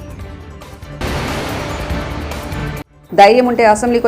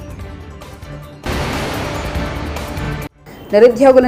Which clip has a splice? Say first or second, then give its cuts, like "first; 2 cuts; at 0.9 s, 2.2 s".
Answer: first; 2 cuts; at 1.0 s, 2.9 s